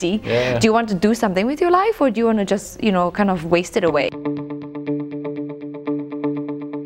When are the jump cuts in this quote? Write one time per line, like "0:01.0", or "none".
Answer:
0:04.1